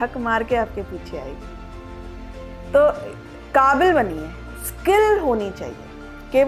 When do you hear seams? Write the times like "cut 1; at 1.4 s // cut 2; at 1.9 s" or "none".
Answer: none